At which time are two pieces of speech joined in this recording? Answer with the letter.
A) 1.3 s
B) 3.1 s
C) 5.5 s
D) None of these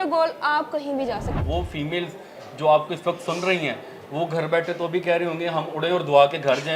A